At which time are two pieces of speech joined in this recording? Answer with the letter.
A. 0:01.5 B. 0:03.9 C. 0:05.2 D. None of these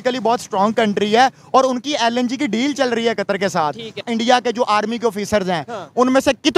B